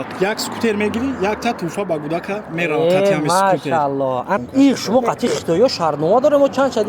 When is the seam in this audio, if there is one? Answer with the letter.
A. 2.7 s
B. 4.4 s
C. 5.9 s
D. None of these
B